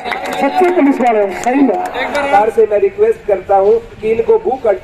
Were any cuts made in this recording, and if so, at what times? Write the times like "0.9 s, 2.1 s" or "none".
2.3 s